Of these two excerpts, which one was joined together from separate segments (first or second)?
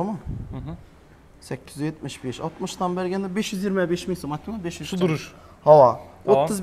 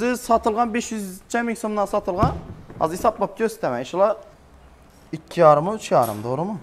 second